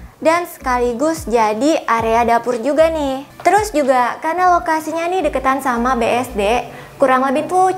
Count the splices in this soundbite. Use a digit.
1